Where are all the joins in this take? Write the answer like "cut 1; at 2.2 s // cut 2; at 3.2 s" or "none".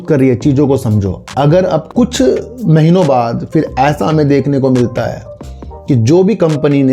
cut 1; at 1.9 s